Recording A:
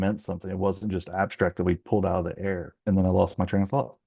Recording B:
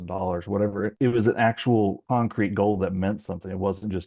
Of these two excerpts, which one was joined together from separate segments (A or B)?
B